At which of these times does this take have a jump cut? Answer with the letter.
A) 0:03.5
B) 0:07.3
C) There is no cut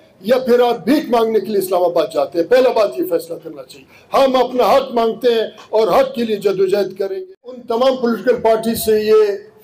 B